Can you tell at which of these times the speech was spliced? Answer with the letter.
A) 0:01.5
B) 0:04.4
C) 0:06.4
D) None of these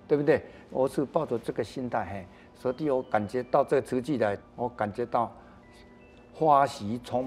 B